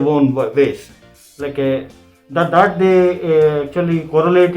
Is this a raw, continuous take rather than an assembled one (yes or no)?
yes